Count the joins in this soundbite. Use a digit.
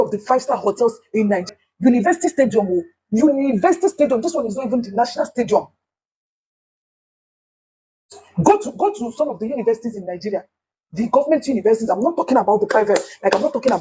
1